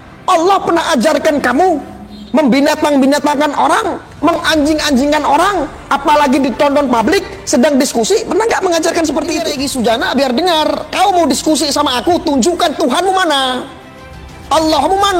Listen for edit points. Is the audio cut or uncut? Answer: cut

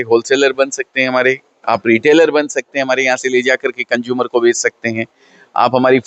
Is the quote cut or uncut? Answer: uncut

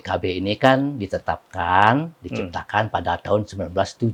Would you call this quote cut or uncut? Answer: uncut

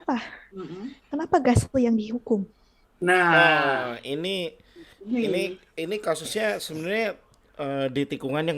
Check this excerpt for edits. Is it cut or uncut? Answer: uncut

